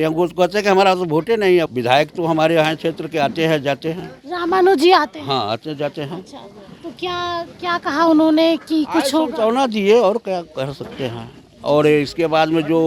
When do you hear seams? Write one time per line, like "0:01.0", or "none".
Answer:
0:01.7